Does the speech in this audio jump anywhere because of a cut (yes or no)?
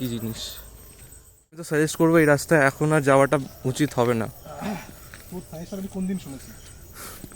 yes